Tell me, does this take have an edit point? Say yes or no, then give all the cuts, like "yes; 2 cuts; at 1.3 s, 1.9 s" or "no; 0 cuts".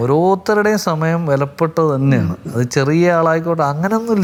no; 0 cuts